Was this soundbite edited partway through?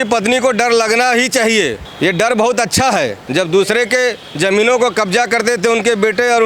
yes; 2 cuts; at 1.8 s, 3.2 s

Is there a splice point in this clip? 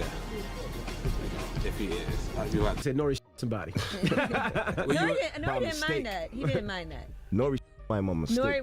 yes; 1 cut; at 2.8 s

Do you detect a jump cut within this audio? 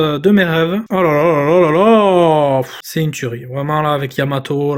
yes; 2 cuts; at 0.8 s, 2.8 s

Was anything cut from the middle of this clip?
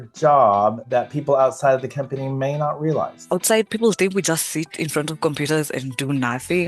yes; 1 cut; at 3.2 s

